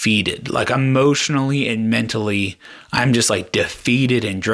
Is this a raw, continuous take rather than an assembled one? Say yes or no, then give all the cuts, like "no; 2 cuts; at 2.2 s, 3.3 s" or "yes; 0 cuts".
yes; 0 cuts